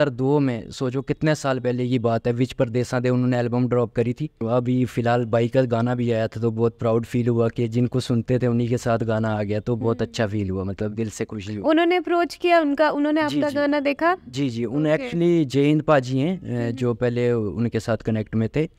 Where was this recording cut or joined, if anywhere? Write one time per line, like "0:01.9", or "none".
0:04.4